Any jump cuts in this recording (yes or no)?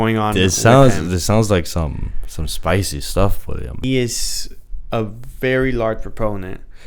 yes